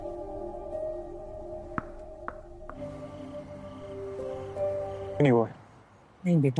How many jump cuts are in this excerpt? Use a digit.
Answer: 1